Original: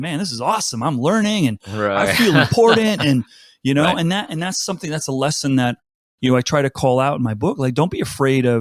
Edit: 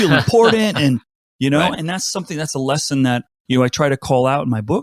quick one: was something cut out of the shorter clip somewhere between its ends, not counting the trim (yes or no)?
yes